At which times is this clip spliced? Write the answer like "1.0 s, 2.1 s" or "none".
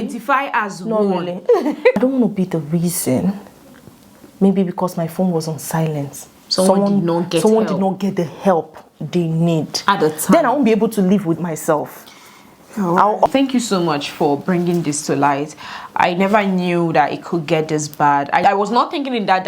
2.0 s, 13.3 s, 18.4 s

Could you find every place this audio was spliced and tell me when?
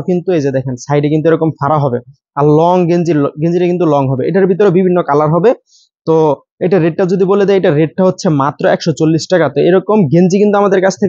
none

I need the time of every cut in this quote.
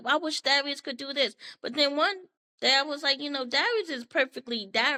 none

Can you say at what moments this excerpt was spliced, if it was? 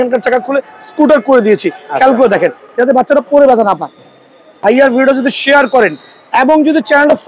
4.5 s

